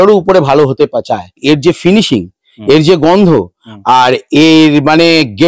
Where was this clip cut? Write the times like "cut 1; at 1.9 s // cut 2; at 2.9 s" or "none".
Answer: cut 1; at 1.4 s